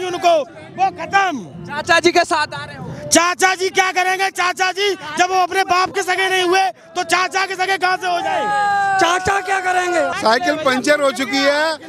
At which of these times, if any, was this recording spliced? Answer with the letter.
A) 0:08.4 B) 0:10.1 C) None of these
B